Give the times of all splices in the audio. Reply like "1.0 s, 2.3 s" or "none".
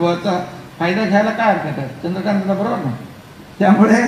none